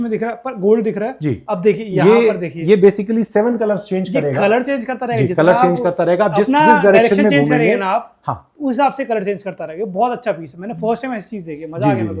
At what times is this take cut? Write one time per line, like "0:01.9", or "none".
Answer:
none